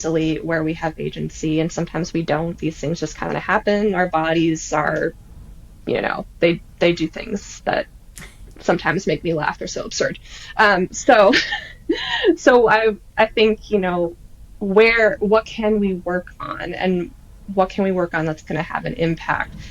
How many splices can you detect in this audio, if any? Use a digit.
0